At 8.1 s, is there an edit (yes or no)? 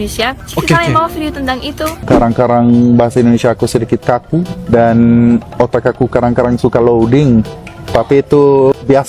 no